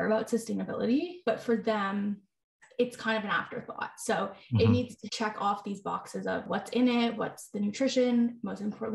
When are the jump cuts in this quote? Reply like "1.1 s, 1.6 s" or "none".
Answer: 1.1 s, 5.0 s, 6.5 s, 7.2 s